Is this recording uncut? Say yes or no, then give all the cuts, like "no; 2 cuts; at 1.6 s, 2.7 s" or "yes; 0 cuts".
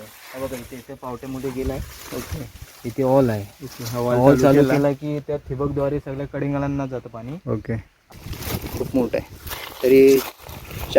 no; 1 cut; at 8.0 s